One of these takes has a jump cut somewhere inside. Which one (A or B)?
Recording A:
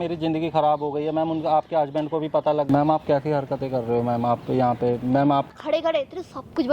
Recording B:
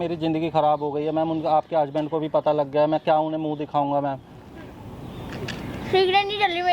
A